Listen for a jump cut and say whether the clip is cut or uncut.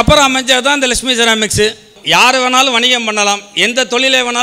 cut